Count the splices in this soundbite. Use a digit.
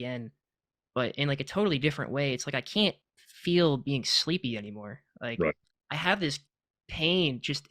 1